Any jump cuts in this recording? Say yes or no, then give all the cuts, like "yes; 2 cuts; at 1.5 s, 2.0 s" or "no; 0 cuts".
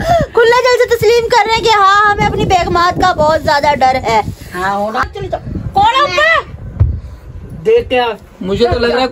yes; 1 cut; at 5.0 s